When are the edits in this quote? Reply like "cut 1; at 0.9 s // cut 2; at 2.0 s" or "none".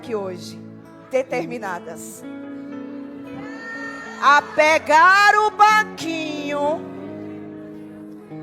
none